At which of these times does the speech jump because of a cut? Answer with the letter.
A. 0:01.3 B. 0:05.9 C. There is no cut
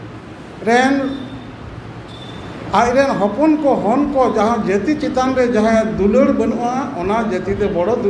C